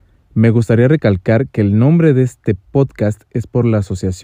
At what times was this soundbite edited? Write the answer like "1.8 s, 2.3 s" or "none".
none